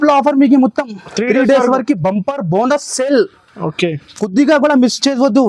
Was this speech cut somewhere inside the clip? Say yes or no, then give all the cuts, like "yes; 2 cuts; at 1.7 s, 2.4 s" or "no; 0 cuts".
no; 0 cuts